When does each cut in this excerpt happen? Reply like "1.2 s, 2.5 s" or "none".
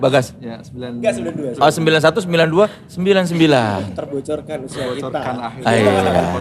none